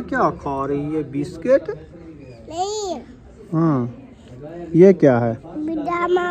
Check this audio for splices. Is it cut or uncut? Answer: uncut